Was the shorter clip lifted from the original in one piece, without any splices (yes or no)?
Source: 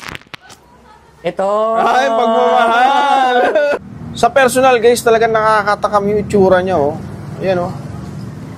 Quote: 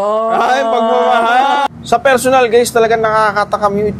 no